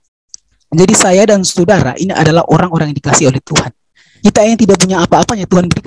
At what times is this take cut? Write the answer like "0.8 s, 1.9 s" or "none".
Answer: 4.1 s